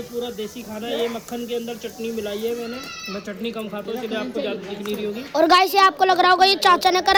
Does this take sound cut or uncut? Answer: uncut